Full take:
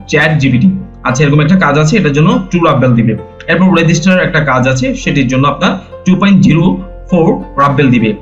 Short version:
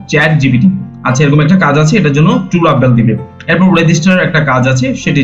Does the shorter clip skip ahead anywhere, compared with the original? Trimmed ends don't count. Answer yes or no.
no